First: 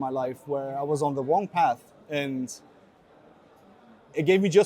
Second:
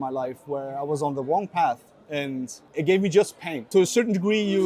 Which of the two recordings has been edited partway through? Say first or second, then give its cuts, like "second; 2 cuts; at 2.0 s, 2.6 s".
second; 2 cuts; at 2.6 s, 3.7 s